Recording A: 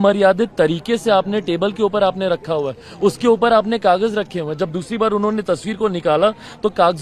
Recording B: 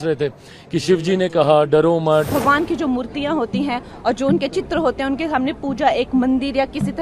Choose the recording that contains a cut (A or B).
B